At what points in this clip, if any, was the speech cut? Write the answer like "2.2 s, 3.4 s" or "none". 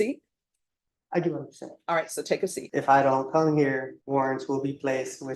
2.6 s, 3.9 s